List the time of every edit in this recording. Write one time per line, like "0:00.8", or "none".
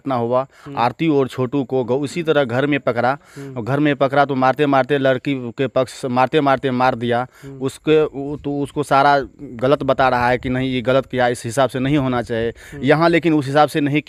none